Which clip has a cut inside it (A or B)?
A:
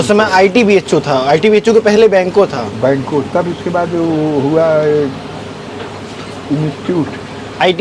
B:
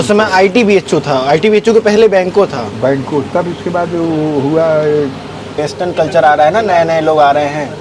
B